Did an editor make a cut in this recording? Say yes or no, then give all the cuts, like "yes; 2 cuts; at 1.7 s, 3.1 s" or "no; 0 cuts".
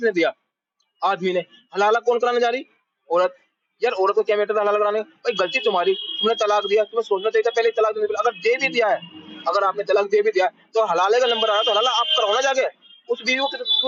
no; 0 cuts